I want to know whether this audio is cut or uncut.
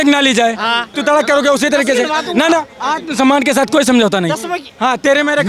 cut